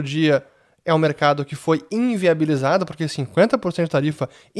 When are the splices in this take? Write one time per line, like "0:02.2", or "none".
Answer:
none